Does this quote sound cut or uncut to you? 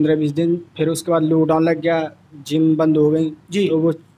uncut